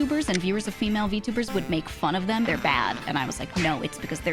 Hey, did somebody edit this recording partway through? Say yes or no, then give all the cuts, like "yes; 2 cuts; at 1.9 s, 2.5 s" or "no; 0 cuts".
yes; 1 cut; at 2.5 s